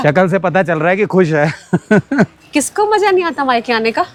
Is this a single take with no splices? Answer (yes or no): yes